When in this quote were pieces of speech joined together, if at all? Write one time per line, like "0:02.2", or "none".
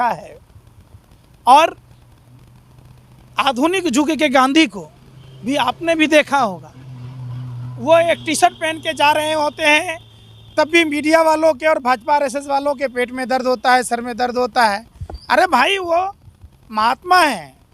none

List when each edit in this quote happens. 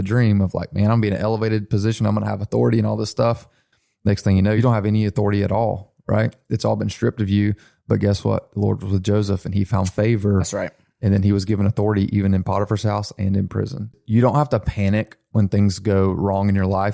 0:03.7
0:04.6
0:14.0

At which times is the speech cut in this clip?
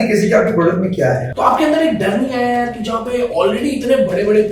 0:01.3

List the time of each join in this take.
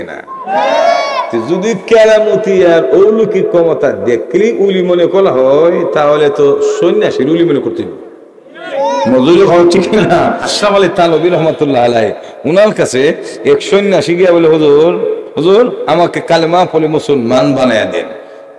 0:10.5

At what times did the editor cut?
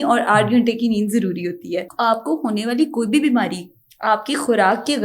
0:01.9

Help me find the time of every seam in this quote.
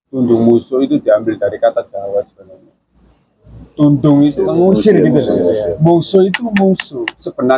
0:04.5

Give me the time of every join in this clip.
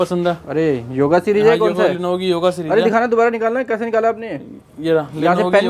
none

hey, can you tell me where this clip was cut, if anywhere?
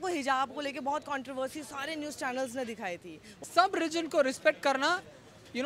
0:03.3

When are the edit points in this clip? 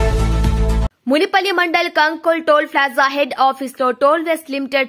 0:00.9

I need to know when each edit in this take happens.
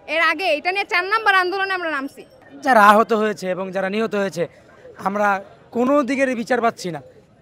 none

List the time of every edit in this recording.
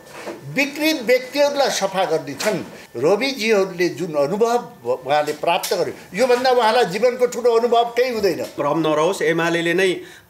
0:02.8
0:08.6

